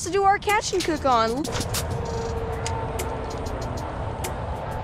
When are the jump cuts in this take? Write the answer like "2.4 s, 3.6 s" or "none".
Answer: 1.4 s